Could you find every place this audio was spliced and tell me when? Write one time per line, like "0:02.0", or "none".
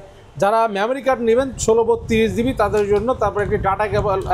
none